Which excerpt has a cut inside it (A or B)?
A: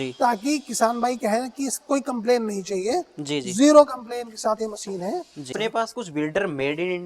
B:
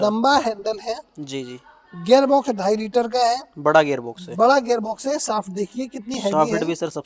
A